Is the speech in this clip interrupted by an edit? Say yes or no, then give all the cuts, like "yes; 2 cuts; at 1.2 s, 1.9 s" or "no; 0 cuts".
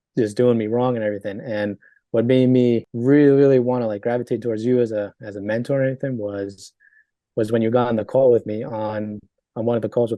yes; 1 cut; at 2.9 s